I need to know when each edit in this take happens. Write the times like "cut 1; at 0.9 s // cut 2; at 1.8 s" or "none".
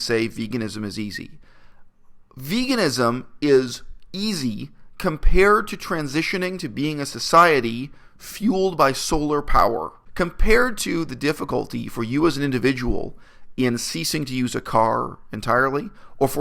cut 1; at 10.0 s